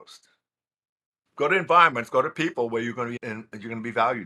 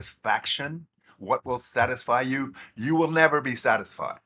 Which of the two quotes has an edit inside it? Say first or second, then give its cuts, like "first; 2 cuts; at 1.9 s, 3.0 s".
first; 1 cut; at 3.2 s